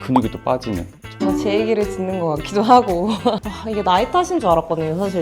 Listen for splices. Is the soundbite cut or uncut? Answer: cut